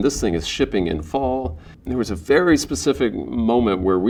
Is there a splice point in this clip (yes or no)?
no